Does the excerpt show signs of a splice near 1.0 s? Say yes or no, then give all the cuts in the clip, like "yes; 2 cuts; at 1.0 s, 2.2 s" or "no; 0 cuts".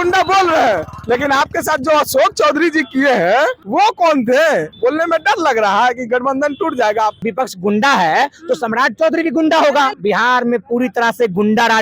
no; 4 cuts; at 3.6 s, 4.7 s, 7.2 s, 9.9 s